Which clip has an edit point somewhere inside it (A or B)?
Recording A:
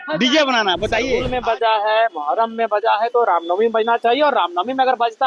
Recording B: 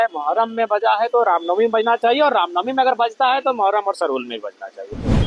A